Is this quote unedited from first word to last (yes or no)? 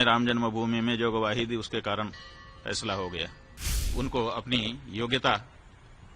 no